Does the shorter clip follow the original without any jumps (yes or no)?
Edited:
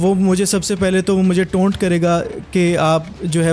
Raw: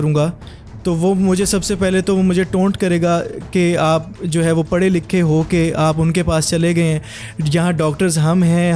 yes